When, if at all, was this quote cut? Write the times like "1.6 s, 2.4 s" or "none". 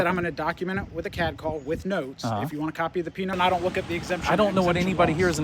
3.3 s